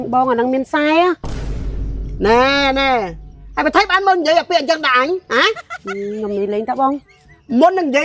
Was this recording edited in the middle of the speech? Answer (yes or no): no